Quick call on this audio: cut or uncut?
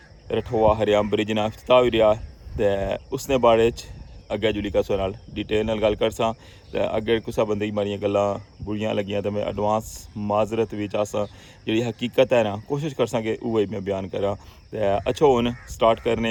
uncut